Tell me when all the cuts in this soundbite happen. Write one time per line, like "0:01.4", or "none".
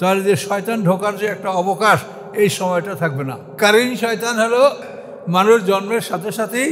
0:03.5
0:04.8